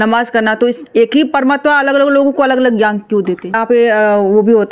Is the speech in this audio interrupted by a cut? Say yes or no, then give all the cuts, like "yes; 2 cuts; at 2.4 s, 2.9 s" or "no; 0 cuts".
yes; 1 cut; at 3.6 s